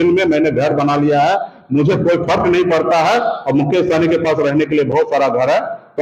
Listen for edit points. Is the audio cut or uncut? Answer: uncut